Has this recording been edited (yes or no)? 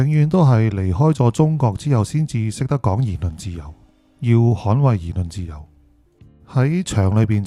no